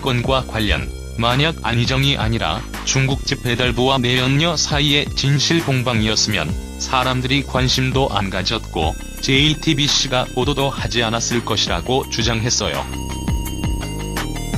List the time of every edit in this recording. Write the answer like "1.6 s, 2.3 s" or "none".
2.9 s